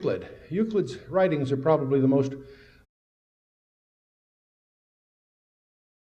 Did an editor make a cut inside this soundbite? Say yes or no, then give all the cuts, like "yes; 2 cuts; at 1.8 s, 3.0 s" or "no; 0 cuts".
no; 0 cuts